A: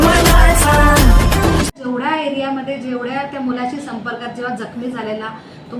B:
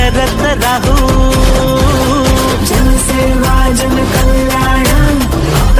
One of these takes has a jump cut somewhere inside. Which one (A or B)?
A